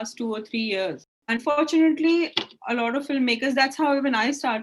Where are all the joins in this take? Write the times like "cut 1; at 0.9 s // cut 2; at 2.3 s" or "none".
cut 1; at 1.2 s